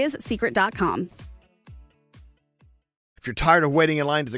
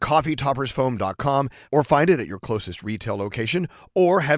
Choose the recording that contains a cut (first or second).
first